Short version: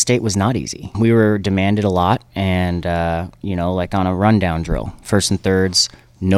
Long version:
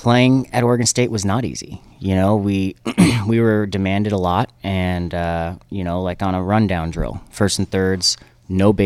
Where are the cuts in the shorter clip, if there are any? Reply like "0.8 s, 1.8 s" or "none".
0.9 s

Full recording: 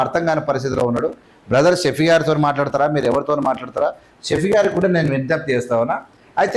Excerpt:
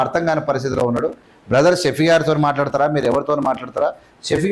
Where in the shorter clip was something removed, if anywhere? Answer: none

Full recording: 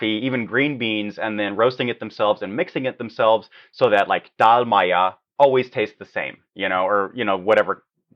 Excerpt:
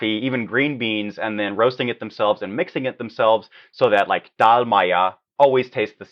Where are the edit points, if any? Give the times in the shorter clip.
none

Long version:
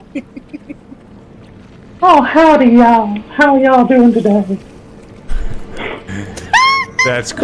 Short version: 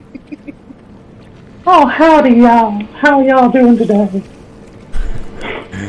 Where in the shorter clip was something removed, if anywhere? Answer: 1.3 s

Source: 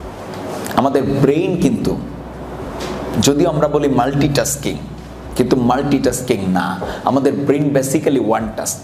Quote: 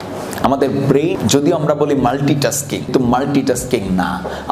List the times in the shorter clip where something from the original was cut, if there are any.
1.2 s, 2.9 s

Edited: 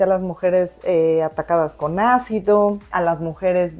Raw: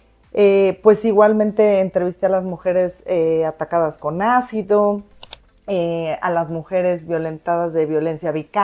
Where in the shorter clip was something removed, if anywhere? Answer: 2.9 s

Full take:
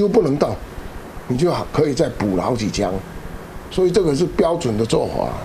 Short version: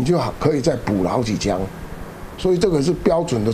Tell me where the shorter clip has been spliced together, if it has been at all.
none

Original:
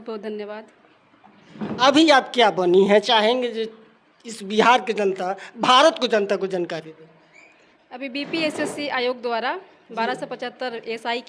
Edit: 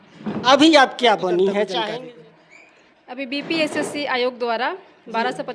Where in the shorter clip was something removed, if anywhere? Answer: 2.0 s

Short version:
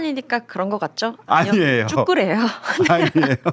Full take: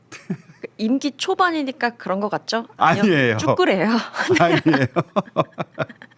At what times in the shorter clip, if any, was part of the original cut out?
none

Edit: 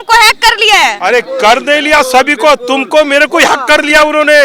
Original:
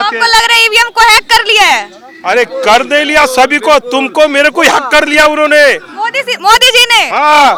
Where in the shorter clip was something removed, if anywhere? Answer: 1.0 s

